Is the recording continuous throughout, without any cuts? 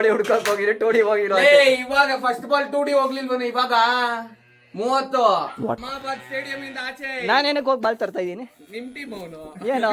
no; 1 cut; at 5.7 s

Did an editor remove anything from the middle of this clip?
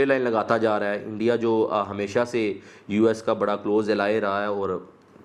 no; 0 cuts

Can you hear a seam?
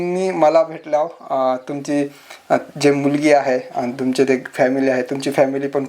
no; 0 cuts

